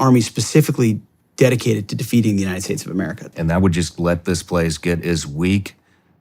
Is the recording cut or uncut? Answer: cut